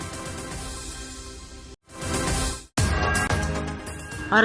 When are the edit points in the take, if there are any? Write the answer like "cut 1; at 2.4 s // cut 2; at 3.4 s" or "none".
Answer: cut 1; at 1.5 s